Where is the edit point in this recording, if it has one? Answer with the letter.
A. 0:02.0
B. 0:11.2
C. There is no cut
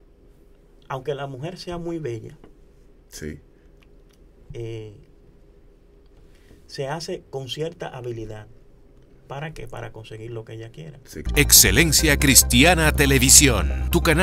B